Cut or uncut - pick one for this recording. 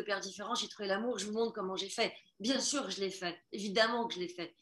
uncut